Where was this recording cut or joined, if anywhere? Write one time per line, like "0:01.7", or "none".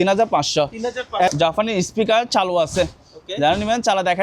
0:01.3

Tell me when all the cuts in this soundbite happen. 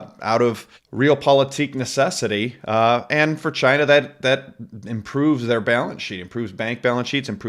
none

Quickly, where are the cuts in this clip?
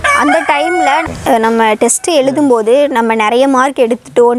0:01.1

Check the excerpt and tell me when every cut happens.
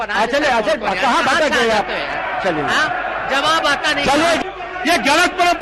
0:04.4

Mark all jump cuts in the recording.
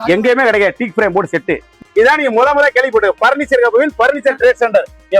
0:01.8

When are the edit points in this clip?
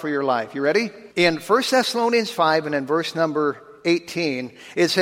0:01.0

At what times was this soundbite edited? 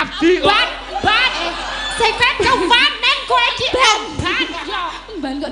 none

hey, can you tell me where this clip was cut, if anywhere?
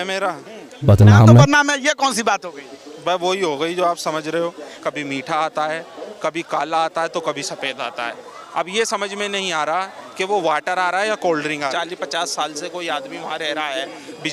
0:04.7
0:11.7

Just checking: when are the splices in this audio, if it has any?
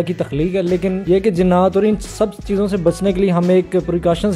0:01.0

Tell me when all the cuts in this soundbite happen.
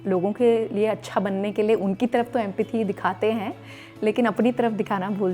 none

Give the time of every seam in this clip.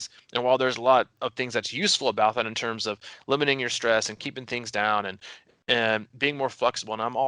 0:01.2

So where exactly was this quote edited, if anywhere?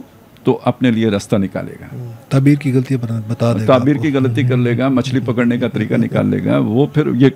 none

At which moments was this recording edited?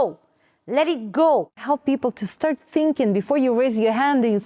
0:01.6

